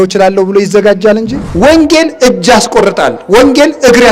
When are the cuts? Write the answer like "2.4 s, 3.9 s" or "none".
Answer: 1.4 s